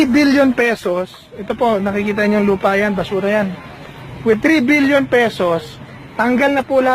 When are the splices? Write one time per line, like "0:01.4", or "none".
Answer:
0:02.5